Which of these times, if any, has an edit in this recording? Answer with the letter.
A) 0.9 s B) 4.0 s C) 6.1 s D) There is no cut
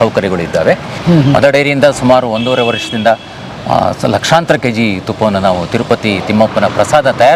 A